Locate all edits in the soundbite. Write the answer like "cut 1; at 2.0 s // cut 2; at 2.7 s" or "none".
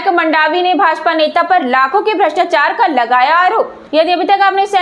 cut 1; at 3.8 s